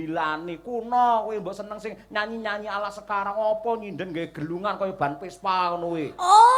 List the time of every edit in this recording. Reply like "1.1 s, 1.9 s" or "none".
none